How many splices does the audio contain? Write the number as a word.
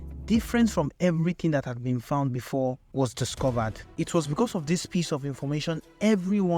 one